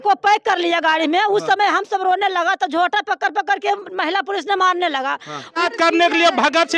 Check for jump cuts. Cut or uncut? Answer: cut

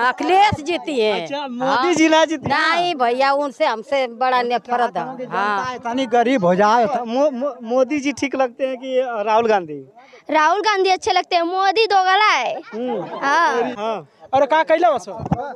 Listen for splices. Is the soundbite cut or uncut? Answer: cut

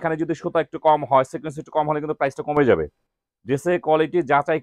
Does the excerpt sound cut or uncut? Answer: uncut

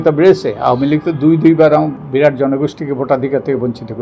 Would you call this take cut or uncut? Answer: cut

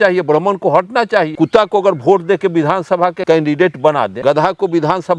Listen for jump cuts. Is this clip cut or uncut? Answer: cut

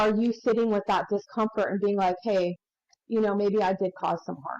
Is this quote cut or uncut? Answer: uncut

